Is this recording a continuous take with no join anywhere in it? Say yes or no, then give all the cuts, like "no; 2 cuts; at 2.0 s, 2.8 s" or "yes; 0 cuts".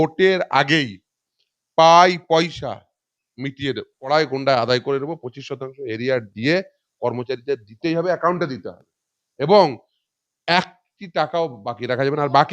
no; 1 cut; at 4.1 s